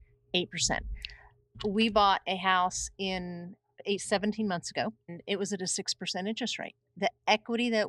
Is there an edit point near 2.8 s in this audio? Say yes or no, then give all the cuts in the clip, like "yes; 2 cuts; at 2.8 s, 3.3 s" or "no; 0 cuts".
no; 3 cuts; at 1.5 s, 5.2 s, 6.8 s